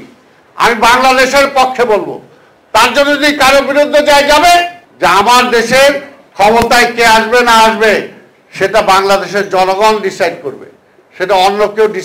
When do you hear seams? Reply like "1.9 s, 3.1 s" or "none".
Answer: 4.8 s